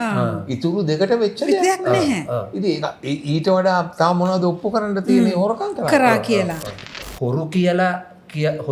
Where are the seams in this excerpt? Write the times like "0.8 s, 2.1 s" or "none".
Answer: 6.7 s